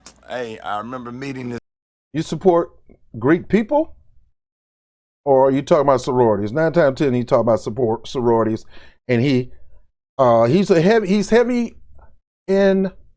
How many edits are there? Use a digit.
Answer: 0